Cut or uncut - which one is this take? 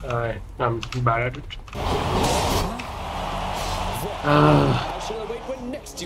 cut